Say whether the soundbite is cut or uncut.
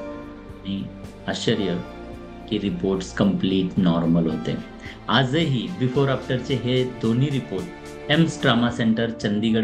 uncut